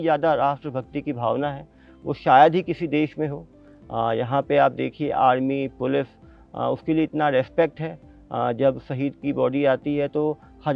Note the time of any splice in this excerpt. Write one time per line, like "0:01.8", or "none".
none